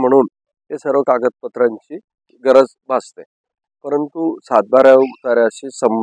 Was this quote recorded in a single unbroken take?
no; 1 cut; at 2.3 s

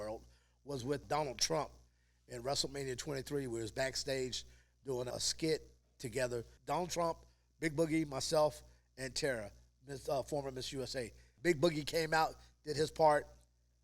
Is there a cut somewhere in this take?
yes; 4 cuts; at 1.0 s, 5.1 s, 6.5 s, 11.2 s

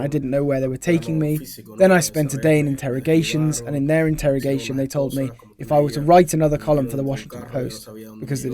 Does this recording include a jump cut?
no; 0 cuts

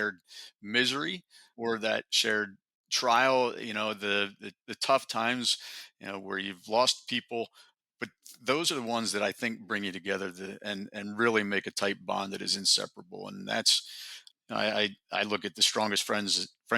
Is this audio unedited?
no; 1 cut; at 1.5 s

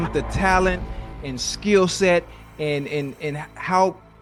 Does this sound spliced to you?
no; 0 cuts

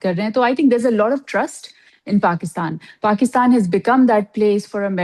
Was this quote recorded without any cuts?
yes; 0 cuts

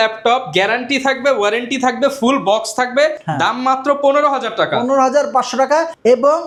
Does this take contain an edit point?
no; 0 cuts

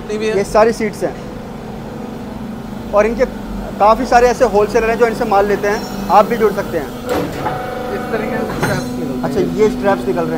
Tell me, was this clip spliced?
no; 0 cuts

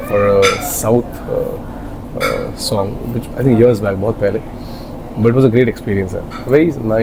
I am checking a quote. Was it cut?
no; 0 cuts

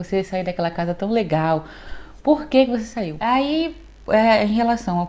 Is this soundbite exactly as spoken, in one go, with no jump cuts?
no; 1 cut; at 3.0 s

